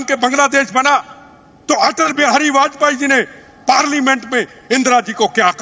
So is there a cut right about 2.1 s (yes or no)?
no